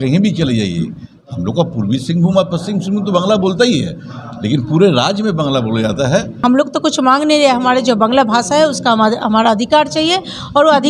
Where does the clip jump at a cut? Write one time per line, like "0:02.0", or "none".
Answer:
0:06.4